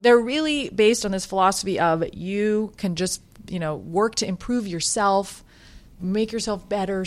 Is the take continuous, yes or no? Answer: yes